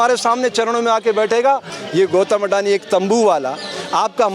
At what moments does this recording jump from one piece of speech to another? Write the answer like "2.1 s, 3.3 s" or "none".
1.8 s